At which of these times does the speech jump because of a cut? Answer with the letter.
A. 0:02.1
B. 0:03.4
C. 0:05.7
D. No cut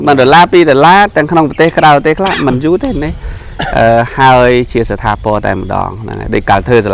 D